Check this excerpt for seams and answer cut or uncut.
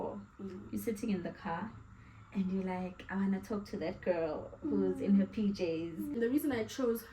cut